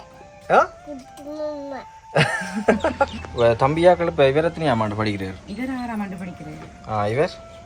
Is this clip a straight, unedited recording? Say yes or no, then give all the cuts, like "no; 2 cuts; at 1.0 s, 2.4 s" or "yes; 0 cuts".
no; 1 cut; at 3.2 s